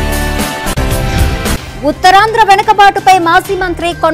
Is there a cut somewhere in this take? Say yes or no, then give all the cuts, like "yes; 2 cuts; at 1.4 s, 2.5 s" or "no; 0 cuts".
no; 0 cuts